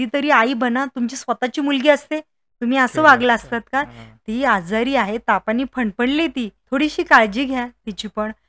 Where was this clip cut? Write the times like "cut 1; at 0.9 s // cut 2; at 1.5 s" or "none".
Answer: cut 1; at 6.6 s

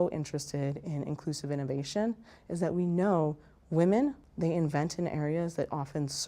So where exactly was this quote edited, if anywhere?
cut 1; at 4.3 s

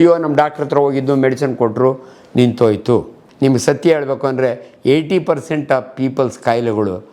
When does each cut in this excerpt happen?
cut 1; at 3.2 s

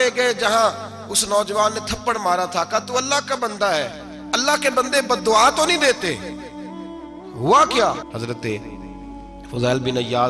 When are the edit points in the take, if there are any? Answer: cut 1; at 8.1 s

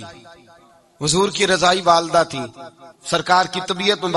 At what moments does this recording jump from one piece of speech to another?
none

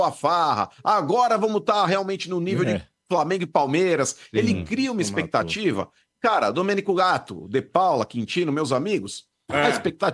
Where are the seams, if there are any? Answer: none

